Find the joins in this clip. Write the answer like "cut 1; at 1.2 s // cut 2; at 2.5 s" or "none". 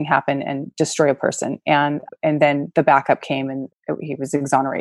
none